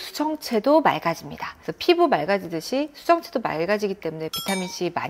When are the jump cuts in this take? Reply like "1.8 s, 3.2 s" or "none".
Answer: none